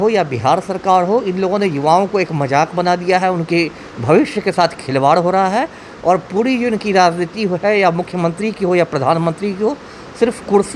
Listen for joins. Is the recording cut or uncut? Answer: uncut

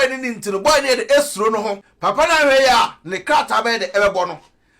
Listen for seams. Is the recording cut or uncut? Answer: cut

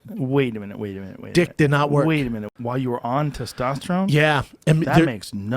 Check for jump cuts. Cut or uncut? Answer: cut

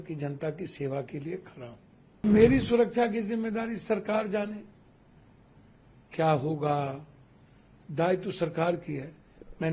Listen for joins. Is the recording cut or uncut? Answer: cut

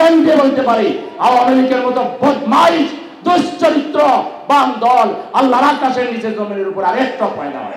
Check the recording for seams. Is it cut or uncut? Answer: uncut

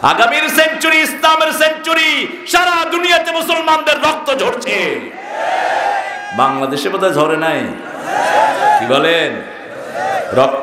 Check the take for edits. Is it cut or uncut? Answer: uncut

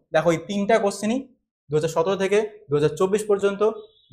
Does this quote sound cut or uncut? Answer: uncut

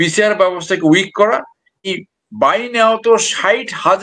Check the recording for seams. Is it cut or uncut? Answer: cut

